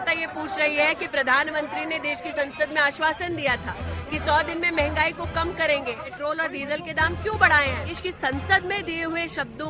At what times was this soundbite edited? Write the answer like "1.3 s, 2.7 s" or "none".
6.1 s, 7.9 s